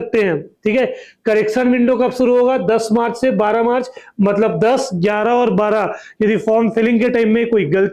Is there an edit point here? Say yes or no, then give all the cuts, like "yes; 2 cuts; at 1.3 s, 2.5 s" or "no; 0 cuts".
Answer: no; 0 cuts